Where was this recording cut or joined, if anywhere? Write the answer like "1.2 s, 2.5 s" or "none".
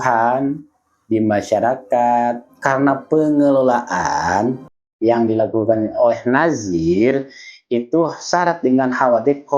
2.5 s